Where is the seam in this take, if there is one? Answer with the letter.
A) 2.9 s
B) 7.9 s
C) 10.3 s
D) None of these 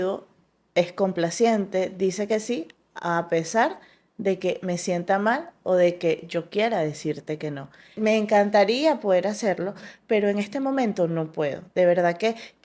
B